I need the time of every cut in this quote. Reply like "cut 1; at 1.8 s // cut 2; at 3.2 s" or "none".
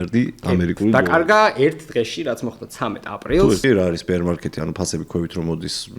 cut 1; at 3.6 s